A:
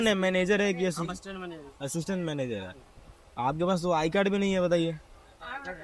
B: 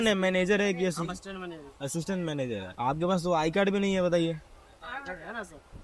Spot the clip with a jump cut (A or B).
B